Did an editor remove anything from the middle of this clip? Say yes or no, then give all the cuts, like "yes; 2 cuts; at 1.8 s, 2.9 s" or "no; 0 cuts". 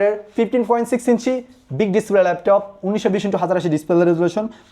no; 0 cuts